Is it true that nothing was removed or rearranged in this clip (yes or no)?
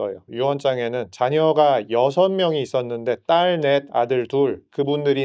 yes